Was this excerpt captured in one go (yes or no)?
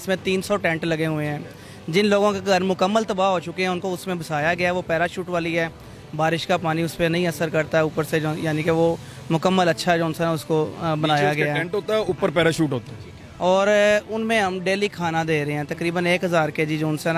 yes